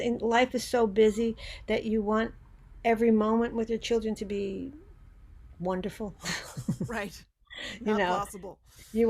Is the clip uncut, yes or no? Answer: yes